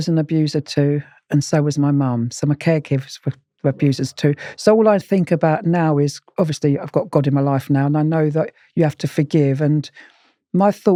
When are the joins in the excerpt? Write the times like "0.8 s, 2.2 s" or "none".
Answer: none